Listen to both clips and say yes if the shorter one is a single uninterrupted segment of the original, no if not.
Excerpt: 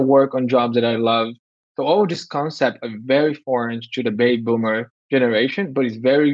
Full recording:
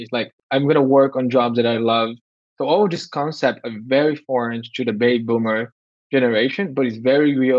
no